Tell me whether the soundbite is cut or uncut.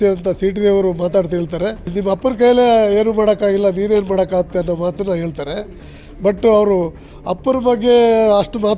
cut